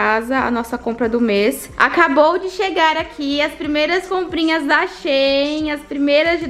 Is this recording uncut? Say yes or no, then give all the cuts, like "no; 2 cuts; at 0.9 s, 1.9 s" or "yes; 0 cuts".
no; 1 cut; at 1.7 s